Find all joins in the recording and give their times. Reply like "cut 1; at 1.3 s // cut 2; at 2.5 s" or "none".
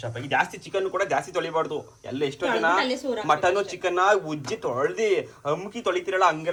none